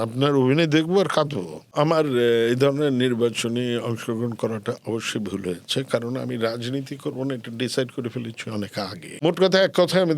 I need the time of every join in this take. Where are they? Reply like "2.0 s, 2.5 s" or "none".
1.7 s, 9.0 s